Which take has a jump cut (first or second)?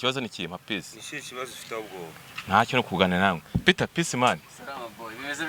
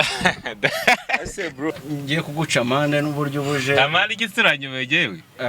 second